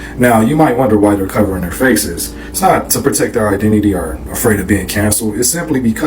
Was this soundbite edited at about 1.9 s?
no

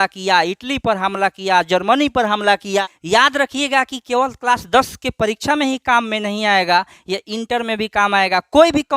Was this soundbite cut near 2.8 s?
yes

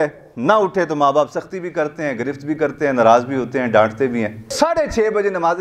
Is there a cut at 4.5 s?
no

